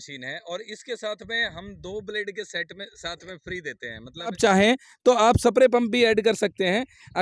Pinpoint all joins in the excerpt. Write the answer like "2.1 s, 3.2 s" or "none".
4.4 s